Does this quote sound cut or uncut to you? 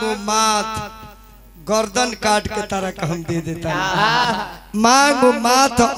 uncut